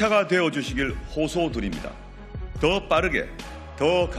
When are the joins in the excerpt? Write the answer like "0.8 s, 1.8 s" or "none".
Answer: none